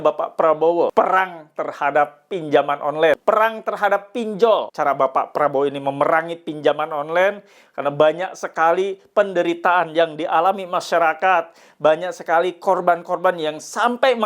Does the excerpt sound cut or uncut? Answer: cut